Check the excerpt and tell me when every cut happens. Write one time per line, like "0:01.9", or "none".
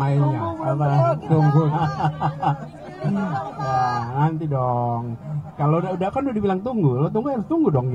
none